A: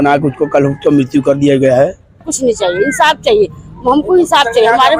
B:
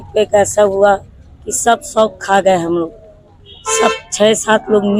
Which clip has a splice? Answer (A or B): A